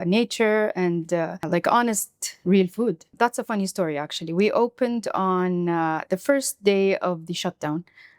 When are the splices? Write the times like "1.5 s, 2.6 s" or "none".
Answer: 1.4 s, 3.1 s